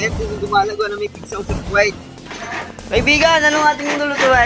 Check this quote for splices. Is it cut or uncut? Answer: cut